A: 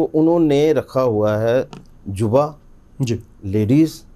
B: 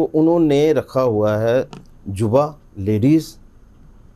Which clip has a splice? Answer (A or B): B